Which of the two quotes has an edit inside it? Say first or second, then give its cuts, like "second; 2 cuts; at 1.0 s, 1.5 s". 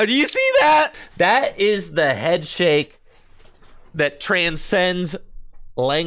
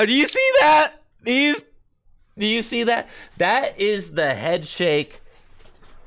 first; 1 cut; at 1.0 s